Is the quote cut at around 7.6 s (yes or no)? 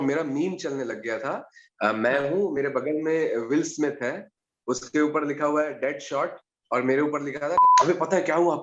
yes